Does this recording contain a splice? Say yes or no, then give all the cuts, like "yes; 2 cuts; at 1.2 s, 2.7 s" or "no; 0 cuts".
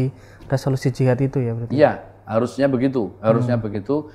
no; 0 cuts